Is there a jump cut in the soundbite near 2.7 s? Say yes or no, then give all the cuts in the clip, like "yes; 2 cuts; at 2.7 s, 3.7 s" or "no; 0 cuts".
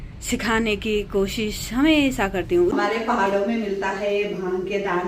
yes; 1 cut; at 2.7 s